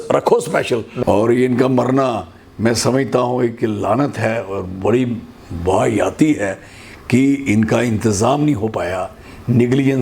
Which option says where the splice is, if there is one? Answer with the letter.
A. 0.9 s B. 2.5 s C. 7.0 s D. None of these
A